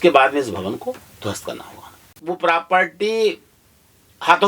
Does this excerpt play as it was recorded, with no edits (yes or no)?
no